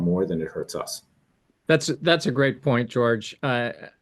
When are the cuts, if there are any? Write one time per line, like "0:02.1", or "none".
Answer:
none

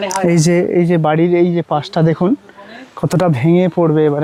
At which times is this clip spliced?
none

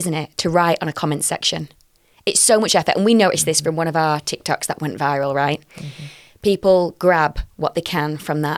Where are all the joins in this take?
none

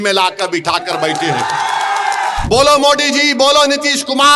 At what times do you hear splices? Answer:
0:02.4

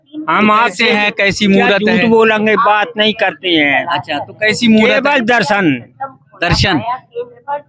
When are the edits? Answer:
none

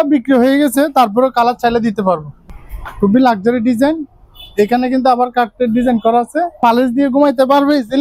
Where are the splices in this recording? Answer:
0:02.3
0:06.6

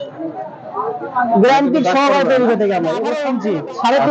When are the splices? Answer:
0:03.2

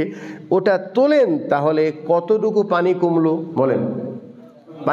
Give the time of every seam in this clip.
none

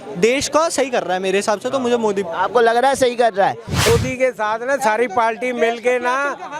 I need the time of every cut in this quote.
0:03.9

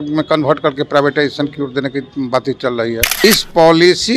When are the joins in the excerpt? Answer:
0:03.1

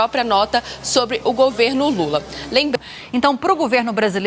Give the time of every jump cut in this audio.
0:02.8

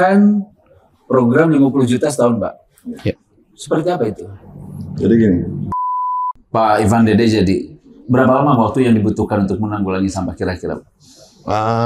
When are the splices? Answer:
0:06.1

